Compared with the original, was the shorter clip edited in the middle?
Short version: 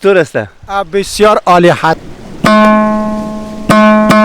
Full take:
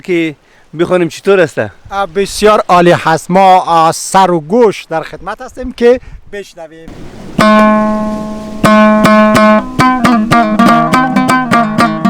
yes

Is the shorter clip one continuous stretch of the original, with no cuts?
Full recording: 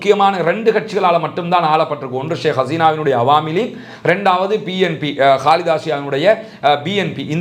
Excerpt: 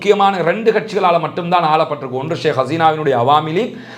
yes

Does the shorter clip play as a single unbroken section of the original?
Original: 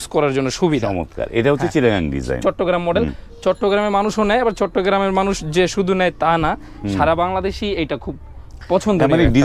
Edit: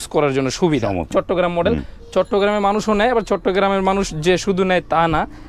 no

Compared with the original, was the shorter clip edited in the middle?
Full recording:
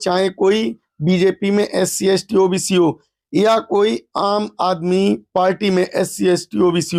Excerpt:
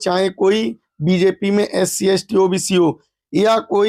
no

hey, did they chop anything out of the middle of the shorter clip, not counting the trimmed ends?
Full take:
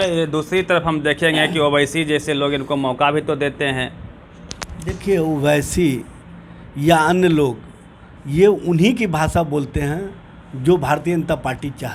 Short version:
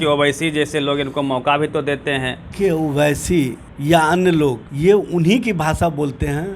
yes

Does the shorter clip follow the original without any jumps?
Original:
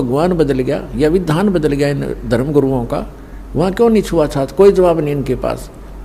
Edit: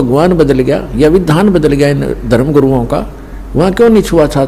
yes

